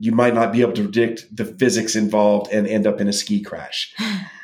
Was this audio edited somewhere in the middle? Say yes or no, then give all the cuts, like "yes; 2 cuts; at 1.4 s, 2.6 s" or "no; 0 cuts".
no; 0 cuts